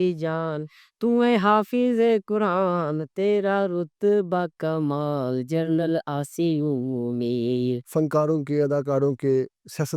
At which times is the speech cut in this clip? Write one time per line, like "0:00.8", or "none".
0:07.8